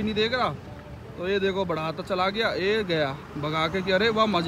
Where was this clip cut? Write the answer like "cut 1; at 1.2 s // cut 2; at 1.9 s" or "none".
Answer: none